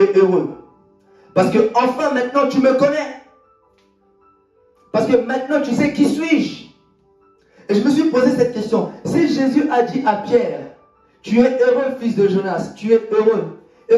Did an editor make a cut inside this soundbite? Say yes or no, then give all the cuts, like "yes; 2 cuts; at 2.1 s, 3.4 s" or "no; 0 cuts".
no; 0 cuts